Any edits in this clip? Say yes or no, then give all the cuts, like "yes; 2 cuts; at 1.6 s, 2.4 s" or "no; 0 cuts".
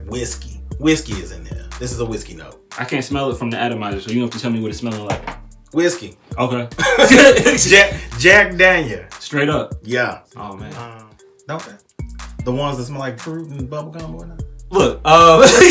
yes; 1 cut; at 10.8 s